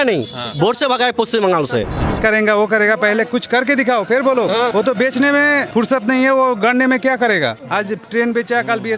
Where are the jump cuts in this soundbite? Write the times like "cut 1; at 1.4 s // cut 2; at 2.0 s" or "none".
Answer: cut 1; at 2.2 s // cut 2; at 4.7 s // cut 3; at 5.7 s // cut 4; at 7.6 s